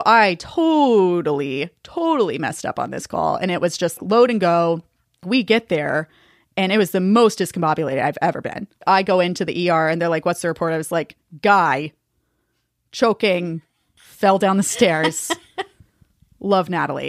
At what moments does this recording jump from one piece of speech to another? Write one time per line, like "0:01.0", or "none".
none